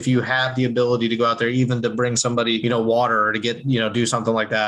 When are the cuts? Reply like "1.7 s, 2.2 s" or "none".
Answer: 2.6 s

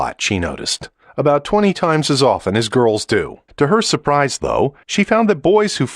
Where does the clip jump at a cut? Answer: 3.4 s, 4.8 s

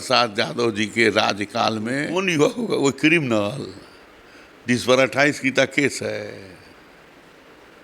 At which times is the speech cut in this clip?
2.1 s

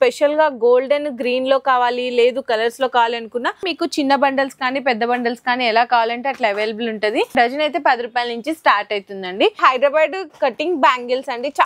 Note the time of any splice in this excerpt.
3.7 s, 7.3 s, 9.6 s

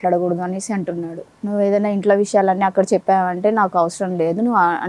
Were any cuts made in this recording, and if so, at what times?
1.3 s

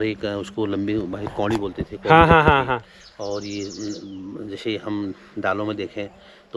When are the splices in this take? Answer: none

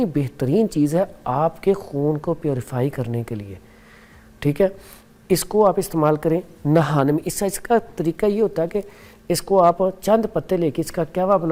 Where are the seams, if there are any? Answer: none

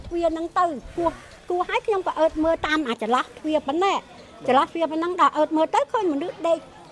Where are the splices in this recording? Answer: none

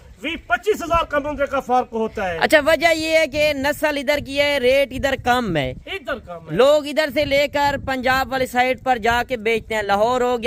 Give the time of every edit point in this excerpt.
none

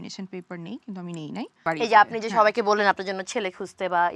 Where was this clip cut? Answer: 1.5 s

